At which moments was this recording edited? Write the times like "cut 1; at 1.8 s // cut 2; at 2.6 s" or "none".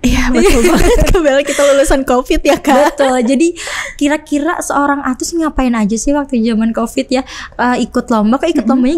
none

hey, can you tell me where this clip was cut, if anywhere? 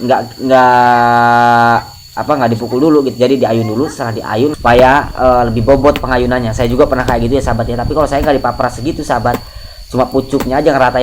cut 1; at 4.5 s

